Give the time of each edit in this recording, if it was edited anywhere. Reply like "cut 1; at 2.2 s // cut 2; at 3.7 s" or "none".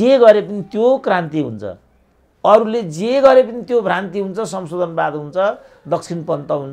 none